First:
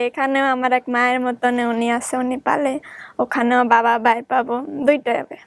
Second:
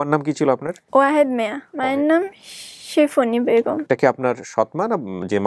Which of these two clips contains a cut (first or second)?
second